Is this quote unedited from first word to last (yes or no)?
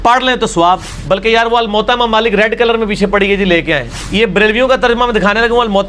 no